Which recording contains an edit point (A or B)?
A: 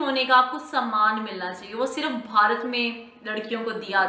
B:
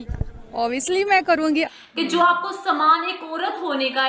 B